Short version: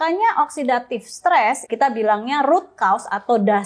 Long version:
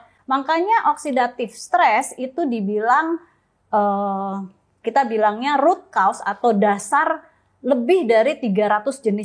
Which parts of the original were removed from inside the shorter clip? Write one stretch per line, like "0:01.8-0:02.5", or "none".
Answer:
0:02.1-0:04.8